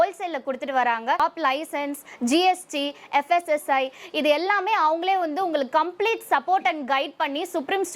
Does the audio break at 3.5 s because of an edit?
no; 1 cut; at 1.2 s

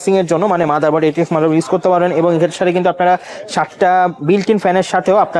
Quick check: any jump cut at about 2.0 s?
no; 0 cuts

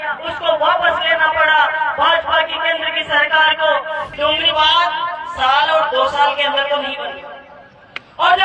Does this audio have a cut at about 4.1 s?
yes; 1 cut; at 4.1 s

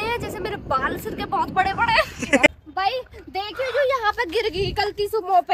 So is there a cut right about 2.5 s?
yes; 1 cut; at 2.5 s

